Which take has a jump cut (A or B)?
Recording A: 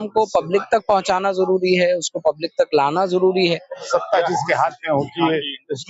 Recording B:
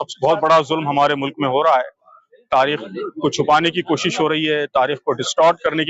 A